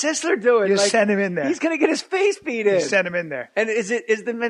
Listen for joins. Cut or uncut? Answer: cut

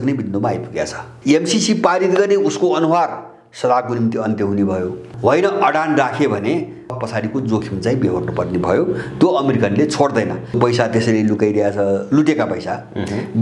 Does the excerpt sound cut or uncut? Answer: cut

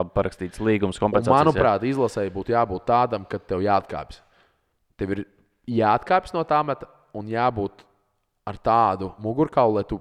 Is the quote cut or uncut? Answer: uncut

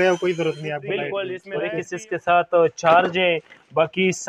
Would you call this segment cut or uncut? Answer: cut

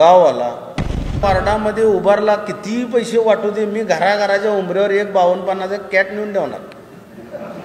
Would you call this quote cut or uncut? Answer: cut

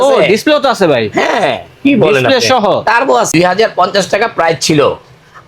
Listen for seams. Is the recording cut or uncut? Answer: cut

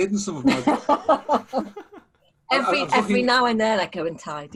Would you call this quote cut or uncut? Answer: uncut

